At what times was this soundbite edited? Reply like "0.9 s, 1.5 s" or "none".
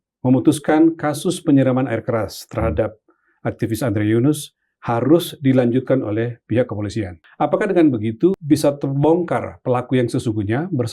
7.2 s, 8.4 s